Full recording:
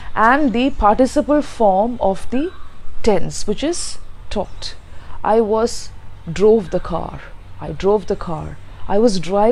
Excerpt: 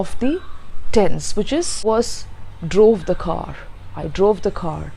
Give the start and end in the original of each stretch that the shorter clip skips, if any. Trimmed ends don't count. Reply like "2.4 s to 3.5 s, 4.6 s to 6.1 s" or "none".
3.9 s to 5.5 s